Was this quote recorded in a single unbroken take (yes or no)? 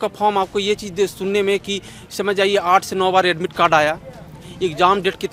yes